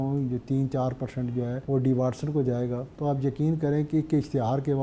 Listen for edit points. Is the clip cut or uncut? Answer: cut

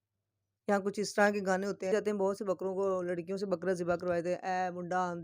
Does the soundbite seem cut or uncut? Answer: cut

